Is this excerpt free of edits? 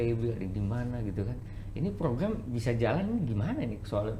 yes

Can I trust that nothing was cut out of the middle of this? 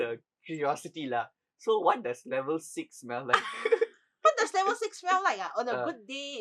yes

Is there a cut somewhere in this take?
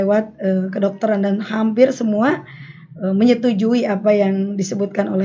no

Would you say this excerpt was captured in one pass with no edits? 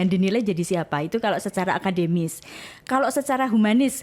yes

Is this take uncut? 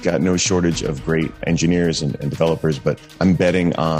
no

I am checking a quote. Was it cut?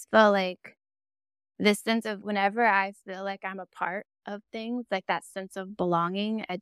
yes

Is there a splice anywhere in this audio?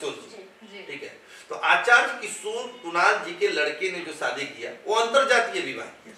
no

